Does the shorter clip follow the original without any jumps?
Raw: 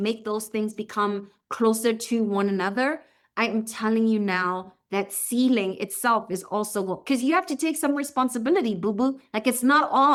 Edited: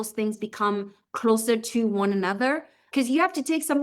no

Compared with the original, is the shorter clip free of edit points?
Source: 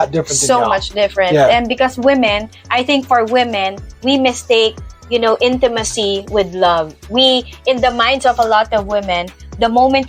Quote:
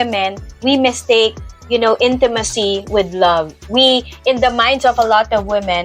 yes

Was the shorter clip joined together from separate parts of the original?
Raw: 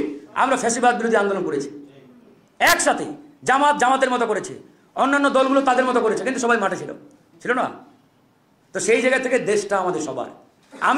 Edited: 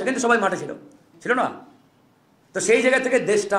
no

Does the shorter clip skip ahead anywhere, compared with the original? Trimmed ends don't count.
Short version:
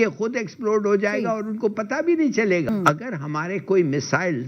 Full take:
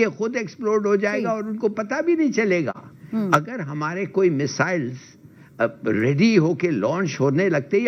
yes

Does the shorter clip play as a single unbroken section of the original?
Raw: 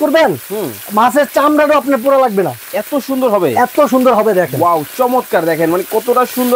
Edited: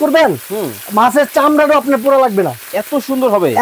yes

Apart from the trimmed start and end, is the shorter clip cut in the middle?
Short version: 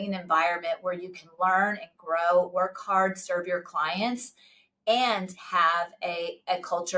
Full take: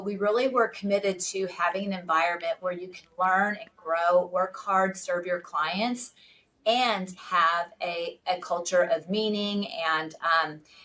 no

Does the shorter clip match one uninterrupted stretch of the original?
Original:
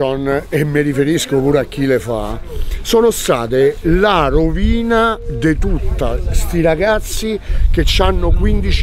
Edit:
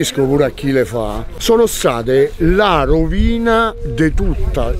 no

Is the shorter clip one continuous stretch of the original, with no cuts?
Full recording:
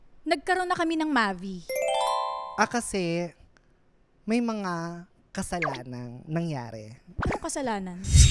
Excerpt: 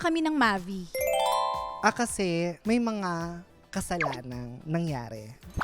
no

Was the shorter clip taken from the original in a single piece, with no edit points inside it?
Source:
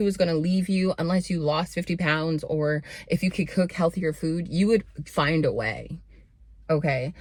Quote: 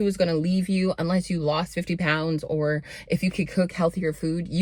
yes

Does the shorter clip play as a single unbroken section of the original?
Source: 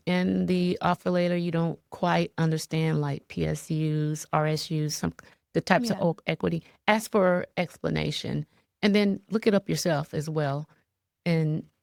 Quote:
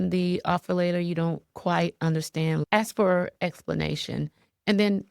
no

